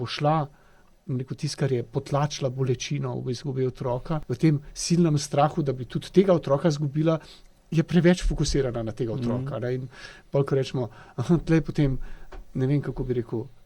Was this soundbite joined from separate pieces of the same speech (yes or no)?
yes